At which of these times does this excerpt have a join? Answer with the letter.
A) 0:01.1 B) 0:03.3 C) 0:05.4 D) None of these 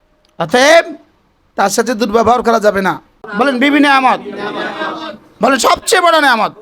B